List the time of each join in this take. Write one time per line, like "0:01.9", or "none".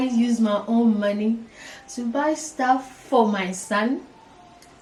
none